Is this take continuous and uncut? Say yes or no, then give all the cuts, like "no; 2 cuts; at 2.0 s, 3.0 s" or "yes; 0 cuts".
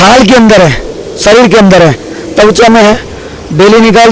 yes; 0 cuts